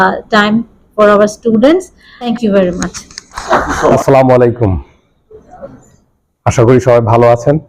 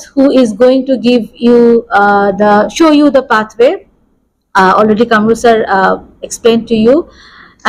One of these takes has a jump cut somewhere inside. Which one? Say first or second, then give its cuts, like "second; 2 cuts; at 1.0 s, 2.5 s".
first; 2 cuts; at 2.3 s, 3.9 s